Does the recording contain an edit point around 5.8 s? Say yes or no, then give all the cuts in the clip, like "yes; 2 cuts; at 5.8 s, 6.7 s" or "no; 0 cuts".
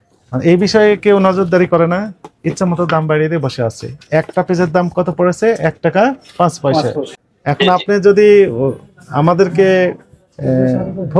no; 1 cut; at 7.2 s